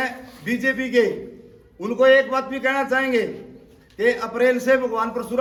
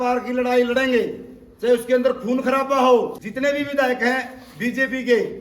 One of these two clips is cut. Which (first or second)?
second